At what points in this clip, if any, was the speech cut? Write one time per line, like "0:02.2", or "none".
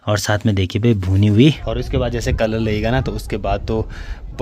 0:01.6